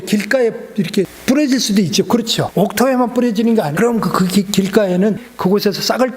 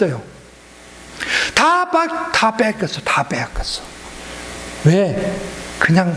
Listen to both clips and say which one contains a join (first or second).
first